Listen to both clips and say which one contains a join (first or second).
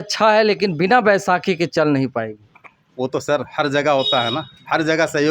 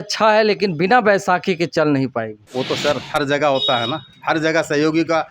second